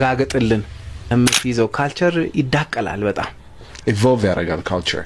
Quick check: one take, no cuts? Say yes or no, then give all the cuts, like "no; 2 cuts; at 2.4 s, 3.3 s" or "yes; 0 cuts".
no; 1 cut; at 1.1 s